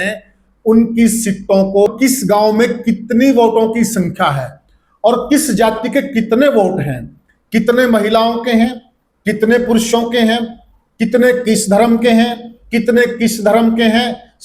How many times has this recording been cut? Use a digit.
1